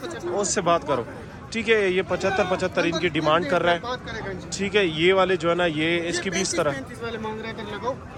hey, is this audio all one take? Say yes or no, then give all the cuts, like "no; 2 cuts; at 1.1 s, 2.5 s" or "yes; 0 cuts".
yes; 0 cuts